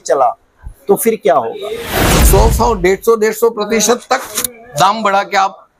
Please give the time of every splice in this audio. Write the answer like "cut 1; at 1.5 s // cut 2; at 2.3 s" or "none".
cut 1; at 2.0 s